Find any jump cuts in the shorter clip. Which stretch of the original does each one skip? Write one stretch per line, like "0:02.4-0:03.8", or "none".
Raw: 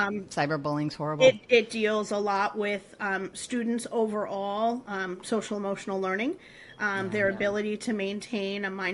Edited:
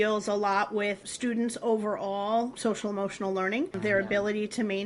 0:02.9-0:03.4
0:04.8-0:05.2
0:06.4-0:07.0

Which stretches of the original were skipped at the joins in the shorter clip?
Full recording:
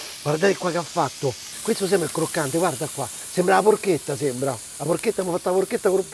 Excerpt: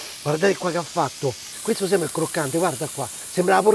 none

